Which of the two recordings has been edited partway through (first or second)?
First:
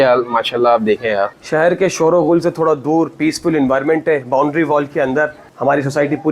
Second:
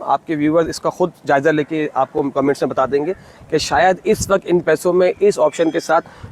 first